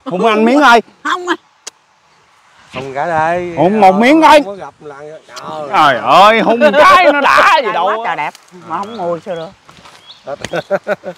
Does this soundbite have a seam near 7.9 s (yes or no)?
yes